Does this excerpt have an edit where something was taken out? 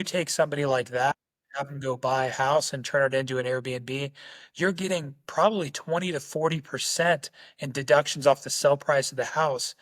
no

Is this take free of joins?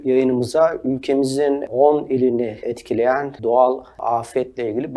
no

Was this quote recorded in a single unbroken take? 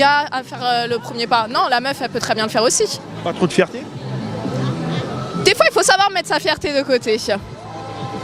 yes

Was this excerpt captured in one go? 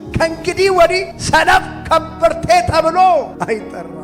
yes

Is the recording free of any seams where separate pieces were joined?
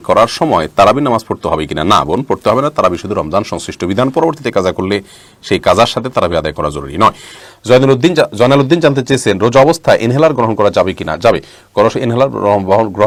yes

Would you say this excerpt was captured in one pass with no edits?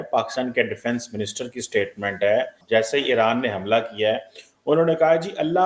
yes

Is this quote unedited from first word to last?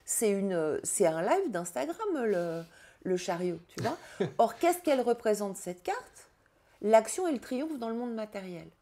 yes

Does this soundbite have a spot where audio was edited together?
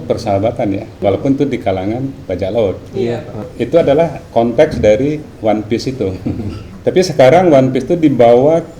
yes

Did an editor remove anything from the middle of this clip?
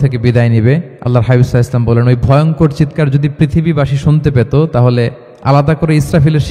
yes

